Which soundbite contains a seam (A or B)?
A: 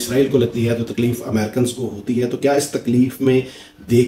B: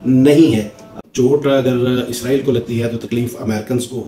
B